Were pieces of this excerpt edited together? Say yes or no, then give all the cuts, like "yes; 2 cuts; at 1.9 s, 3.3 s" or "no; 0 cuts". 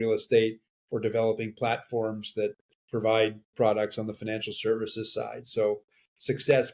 no; 0 cuts